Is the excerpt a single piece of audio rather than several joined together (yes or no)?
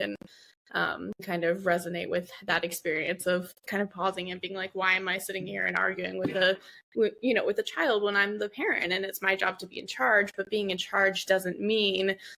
no